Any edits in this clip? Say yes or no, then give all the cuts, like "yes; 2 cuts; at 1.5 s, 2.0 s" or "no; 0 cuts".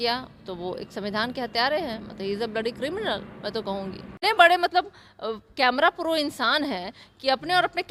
yes; 1 cut; at 4.1 s